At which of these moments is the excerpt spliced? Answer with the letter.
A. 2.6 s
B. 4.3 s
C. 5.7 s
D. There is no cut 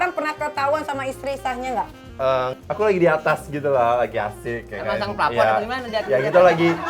A